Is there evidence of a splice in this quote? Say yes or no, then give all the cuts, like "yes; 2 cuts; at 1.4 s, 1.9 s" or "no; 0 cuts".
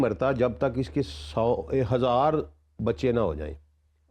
no; 0 cuts